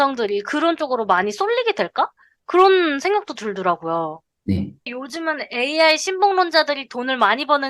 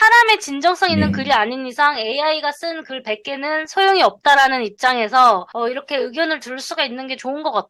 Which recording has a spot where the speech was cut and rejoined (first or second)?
first